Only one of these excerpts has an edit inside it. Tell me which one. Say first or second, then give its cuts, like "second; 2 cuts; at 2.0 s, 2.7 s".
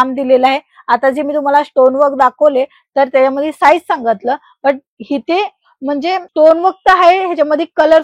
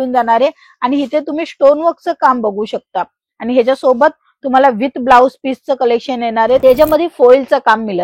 second; 1 cut; at 6.6 s